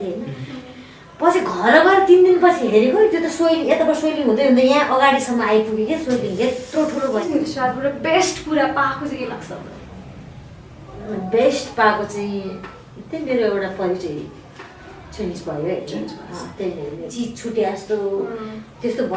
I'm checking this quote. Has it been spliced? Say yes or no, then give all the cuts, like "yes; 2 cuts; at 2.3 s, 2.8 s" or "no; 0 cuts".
yes; 2 cuts; at 7.3 s, 17.1 s